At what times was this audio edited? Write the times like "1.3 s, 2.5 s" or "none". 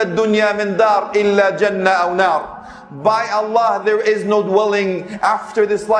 none